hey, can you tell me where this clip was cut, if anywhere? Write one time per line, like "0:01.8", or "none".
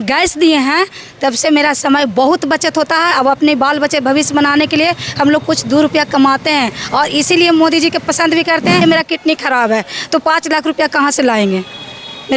0:08.8